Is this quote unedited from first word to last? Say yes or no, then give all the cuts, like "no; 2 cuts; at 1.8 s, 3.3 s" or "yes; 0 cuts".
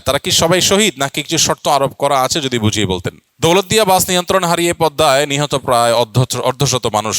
no; 1 cut; at 3.2 s